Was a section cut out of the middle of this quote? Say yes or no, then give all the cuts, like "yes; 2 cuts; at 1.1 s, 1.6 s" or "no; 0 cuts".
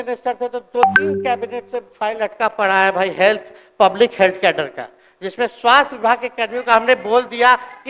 no; 0 cuts